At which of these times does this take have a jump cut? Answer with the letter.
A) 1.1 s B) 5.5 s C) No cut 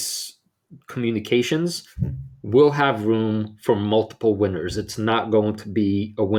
C